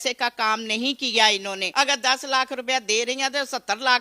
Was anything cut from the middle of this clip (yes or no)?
yes